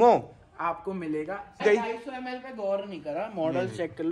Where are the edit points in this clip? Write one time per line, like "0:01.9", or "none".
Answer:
0:01.6